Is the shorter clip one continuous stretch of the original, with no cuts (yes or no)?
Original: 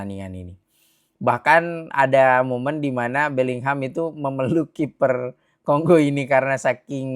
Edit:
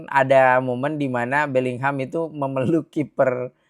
yes